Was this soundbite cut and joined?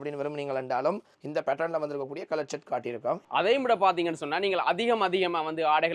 yes; 2 cuts; at 1.2 s, 3.2 s

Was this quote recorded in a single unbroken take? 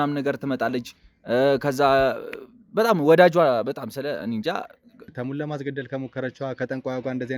no; 1 cut; at 5.0 s

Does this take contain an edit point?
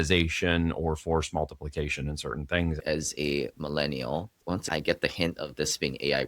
yes; 2 cuts; at 2.8 s, 4.6 s

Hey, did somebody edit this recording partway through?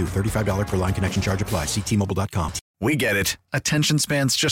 yes; 1 cut; at 2.6 s

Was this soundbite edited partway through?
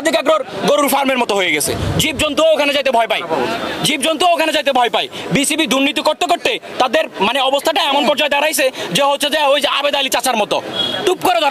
no; 0 cuts

